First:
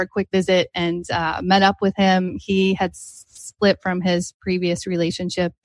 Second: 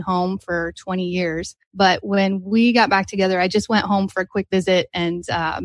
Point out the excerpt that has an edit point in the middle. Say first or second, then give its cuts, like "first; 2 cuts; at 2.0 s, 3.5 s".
second; 1 cut; at 1.6 s